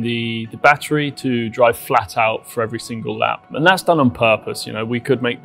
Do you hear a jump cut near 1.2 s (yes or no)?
no